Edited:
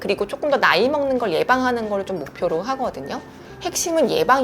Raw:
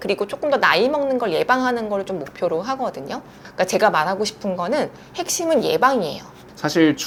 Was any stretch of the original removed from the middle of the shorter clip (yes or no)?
yes